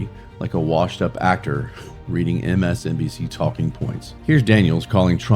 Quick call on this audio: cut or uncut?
cut